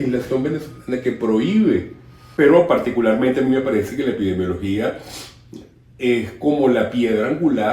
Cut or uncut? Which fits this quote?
cut